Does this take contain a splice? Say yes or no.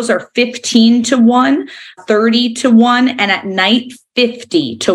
no